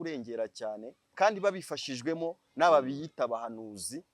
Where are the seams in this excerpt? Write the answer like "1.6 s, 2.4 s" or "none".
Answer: 1.0 s